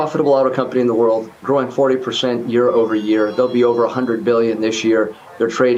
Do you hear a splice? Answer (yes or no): no